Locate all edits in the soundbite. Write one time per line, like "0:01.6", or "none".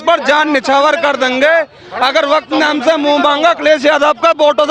none